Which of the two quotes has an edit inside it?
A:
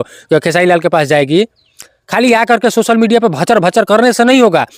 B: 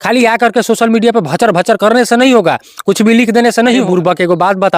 B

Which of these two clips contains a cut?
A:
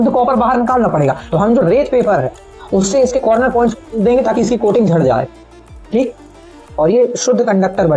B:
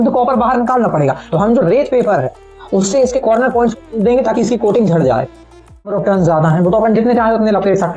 B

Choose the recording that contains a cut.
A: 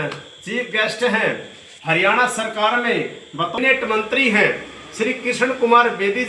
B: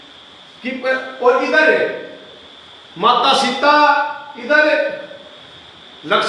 A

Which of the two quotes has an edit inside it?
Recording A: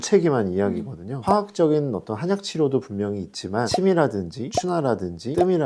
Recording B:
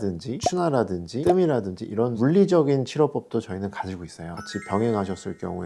A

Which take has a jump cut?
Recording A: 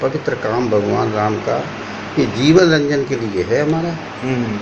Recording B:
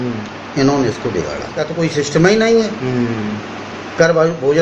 B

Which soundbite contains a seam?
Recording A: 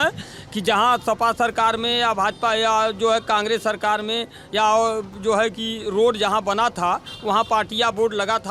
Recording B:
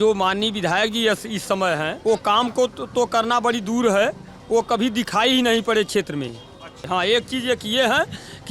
B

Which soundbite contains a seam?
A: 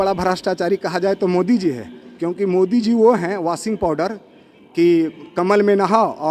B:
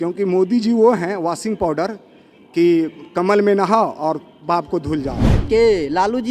B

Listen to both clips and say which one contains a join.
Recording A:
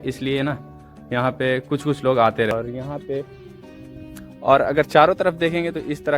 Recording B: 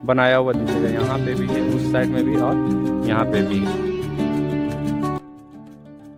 A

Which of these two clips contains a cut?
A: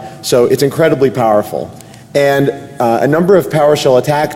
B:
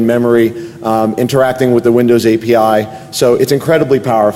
B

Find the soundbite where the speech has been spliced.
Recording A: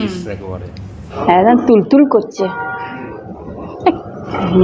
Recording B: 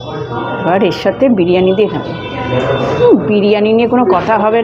A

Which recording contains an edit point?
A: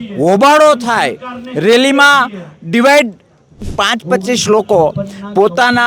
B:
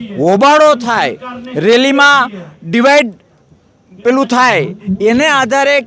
A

